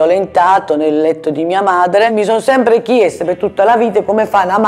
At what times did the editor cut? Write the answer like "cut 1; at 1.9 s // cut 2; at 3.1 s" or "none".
cut 1; at 2.1 s